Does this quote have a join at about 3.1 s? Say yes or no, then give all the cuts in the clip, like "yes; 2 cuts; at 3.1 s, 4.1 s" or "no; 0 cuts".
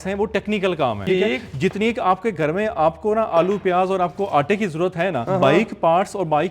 no; 2 cuts; at 1.0 s, 5.2 s